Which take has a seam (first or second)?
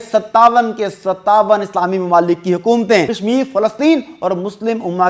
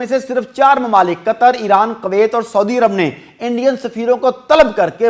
first